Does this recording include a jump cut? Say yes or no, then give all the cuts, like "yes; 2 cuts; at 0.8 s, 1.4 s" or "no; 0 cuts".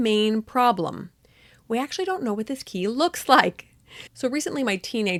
no; 0 cuts